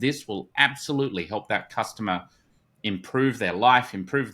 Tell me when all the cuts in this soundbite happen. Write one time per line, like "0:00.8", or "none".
none